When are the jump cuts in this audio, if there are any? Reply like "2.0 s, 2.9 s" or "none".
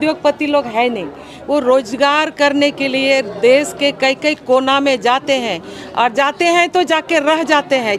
none